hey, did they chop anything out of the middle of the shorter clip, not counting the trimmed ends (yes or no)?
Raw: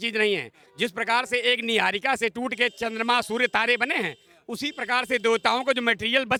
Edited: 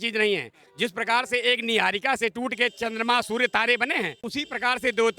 yes